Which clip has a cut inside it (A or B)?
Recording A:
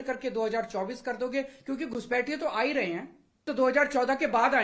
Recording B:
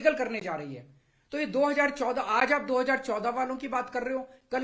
A